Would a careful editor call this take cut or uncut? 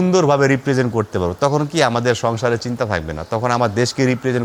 uncut